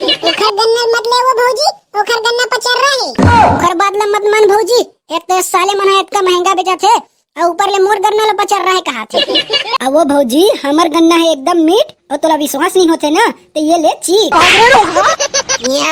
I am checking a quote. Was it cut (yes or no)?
no